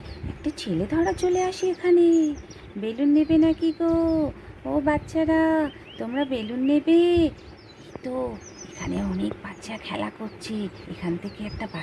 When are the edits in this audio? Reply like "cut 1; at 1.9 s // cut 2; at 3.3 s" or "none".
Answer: cut 1; at 10.7 s